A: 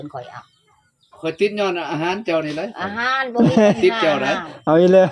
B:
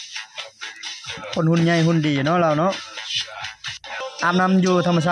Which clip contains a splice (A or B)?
B